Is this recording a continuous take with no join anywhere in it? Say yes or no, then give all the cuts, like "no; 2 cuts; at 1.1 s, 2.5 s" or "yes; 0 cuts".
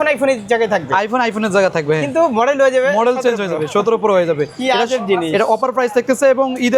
yes; 0 cuts